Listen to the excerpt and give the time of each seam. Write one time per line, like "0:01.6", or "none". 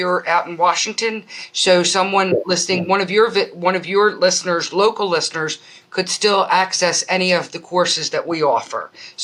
none

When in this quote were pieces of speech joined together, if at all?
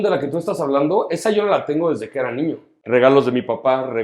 0:02.8

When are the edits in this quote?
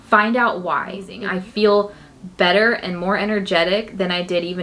0:01.2

